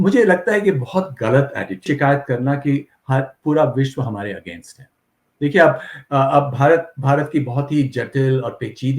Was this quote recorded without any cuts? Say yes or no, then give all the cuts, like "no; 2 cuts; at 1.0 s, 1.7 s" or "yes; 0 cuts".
no; 1 cut; at 1.8 s